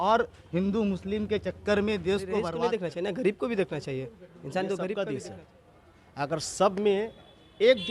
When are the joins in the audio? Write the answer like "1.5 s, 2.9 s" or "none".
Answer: 2.5 s, 5.1 s